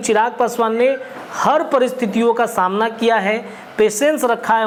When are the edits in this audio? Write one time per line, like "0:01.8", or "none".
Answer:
none